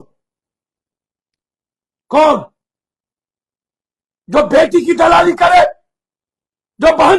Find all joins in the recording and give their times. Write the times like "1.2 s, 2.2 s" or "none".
none